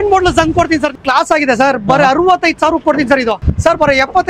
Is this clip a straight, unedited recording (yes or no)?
no